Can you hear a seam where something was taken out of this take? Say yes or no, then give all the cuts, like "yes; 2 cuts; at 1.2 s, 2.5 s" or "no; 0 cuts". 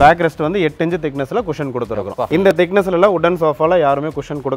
no; 0 cuts